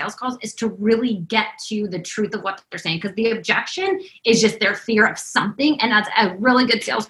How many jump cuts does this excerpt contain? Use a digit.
0